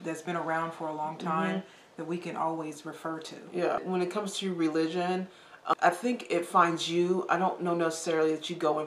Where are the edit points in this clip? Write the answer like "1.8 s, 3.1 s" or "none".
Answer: 3.8 s, 5.7 s